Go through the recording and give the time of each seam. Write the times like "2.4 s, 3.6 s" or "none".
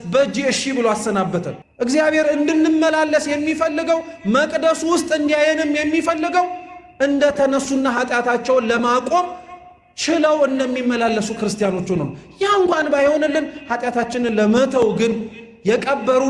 1.6 s